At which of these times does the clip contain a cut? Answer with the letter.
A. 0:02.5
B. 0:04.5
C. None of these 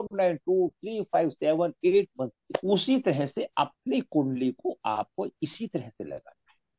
A